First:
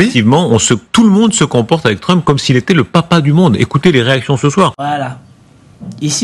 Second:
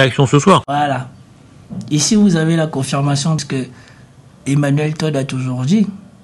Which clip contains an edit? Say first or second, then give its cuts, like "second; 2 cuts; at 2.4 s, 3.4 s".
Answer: second; 1 cut; at 3.4 s